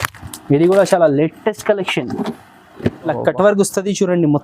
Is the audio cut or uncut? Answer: cut